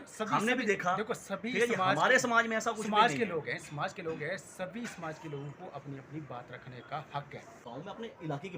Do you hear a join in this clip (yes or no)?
yes